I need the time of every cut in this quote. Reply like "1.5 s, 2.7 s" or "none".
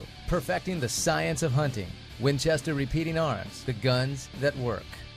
none